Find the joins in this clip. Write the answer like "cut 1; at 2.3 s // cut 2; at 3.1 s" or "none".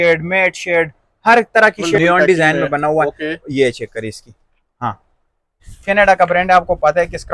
cut 1; at 2.0 s // cut 2; at 5.7 s